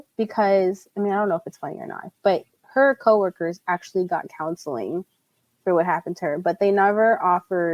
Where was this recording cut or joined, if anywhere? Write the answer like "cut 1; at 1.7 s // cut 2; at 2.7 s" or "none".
none